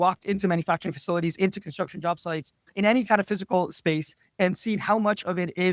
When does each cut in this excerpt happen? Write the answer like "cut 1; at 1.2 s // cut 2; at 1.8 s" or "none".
cut 1; at 2.7 s